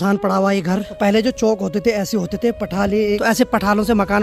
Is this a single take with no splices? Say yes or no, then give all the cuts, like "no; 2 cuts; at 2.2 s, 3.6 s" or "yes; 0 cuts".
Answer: no; 2 cuts; at 0.9 s, 3.2 s